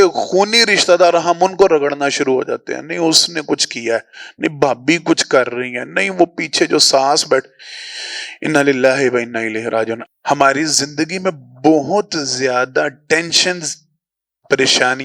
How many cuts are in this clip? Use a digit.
1